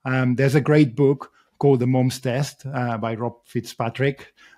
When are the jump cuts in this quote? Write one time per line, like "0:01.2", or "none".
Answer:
none